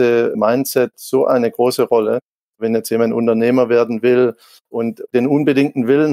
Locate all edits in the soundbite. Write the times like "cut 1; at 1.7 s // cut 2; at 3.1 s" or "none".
cut 1; at 2.6 s // cut 2; at 5.0 s